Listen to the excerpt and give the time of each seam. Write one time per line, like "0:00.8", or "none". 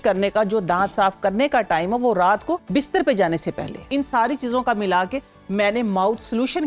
0:02.6
0:03.9